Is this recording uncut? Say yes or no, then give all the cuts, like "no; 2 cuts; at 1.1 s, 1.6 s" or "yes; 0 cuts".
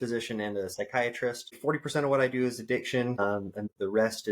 no; 2 cuts; at 1.6 s, 3.5 s